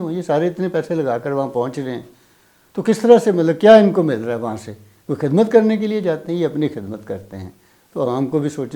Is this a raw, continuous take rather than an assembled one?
yes; 0 cuts

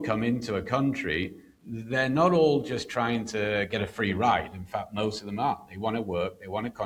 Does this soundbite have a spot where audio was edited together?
no; 0 cuts

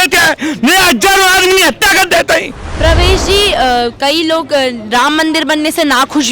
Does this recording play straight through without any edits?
no; 1 cut; at 2.6 s

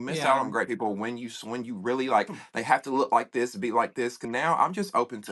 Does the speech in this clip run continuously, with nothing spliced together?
no; 1 cut; at 4.2 s

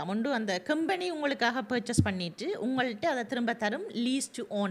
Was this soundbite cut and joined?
no; 0 cuts

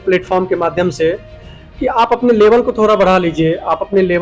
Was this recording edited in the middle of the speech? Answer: no; 0 cuts

